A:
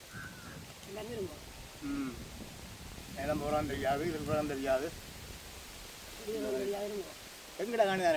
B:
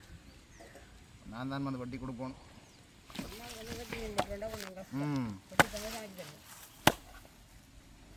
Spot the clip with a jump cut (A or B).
A